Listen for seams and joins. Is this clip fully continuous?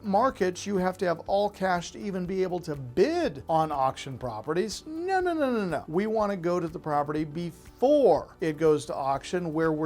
no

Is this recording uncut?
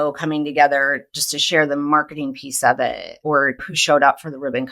no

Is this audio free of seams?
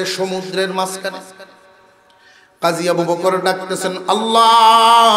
yes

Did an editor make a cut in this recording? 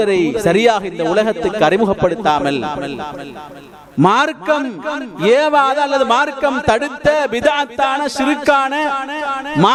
no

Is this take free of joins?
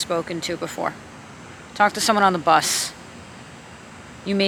yes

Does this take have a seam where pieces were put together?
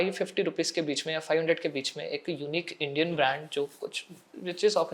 no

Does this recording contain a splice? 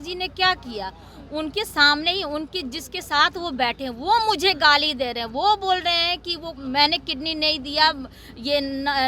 no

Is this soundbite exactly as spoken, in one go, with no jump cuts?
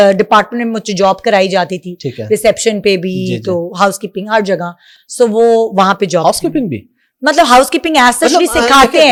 yes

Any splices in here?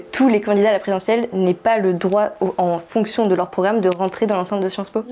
no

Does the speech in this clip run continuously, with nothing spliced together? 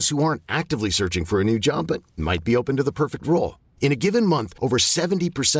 yes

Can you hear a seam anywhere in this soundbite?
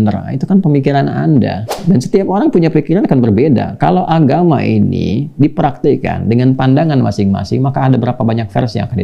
yes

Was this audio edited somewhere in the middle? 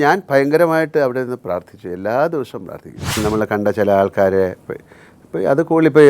yes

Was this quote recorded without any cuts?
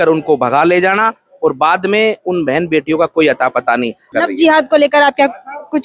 no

